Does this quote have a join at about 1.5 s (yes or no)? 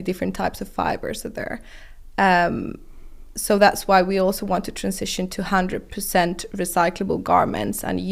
no